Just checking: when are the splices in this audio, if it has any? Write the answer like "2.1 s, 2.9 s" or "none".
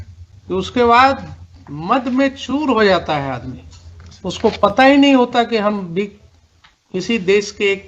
none